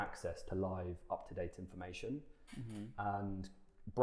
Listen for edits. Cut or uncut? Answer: uncut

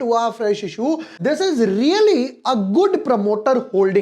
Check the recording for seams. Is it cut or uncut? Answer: cut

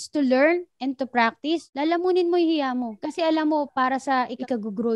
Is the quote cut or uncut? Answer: uncut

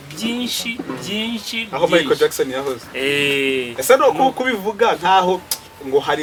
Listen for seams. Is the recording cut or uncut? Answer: uncut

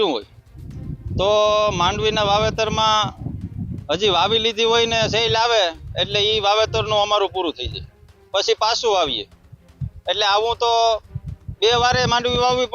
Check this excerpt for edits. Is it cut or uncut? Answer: uncut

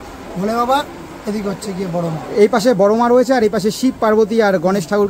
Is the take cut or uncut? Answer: uncut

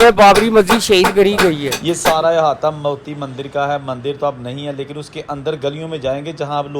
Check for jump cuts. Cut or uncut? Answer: cut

